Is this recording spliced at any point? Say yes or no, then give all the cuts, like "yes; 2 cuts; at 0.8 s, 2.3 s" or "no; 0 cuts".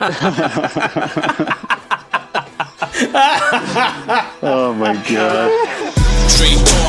yes; 1 cut; at 5.8 s